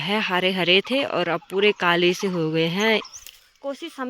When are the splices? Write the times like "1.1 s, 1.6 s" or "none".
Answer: 3.2 s